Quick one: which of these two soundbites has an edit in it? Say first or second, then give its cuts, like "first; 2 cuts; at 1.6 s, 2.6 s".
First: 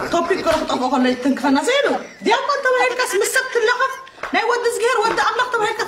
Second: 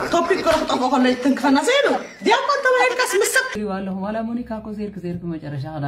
second; 1 cut; at 3.5 s